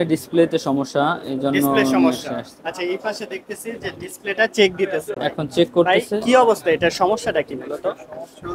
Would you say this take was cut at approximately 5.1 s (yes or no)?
no